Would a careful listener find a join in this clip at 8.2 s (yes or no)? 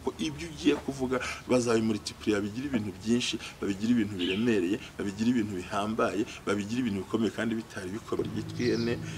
yes